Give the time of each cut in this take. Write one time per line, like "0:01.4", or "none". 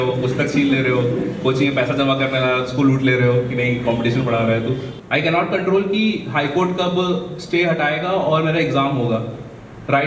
0:04.9